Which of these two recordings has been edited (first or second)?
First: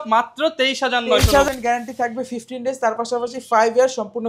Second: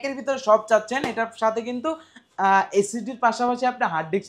first